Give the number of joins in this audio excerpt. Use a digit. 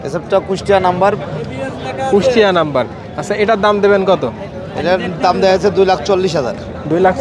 0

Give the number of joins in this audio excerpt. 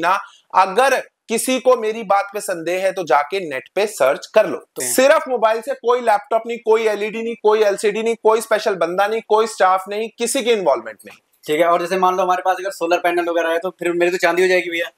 1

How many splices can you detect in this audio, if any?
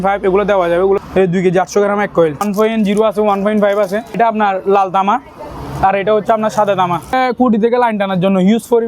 4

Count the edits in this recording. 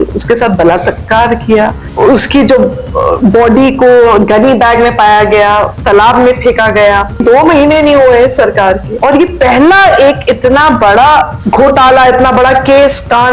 4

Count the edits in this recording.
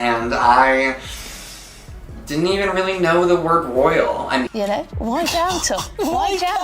1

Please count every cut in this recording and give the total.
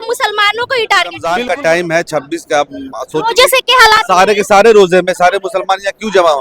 1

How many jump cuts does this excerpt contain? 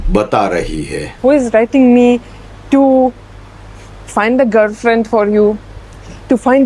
1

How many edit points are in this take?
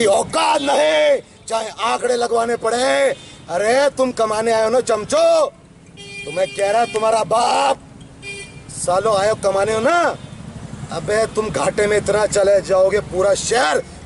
0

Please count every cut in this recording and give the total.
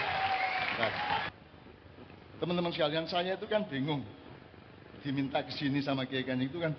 1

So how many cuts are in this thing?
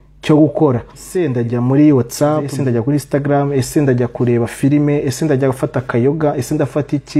2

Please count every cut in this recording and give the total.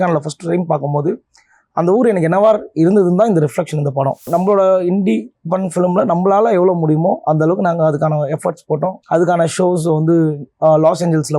1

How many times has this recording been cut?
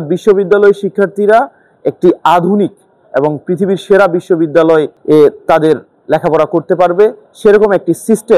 1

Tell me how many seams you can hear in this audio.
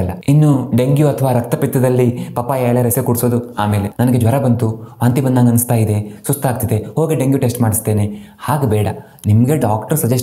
1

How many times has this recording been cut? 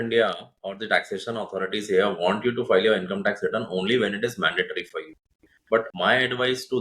1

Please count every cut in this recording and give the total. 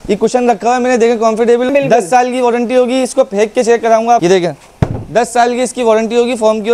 2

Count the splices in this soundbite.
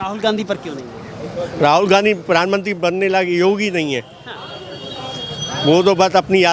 0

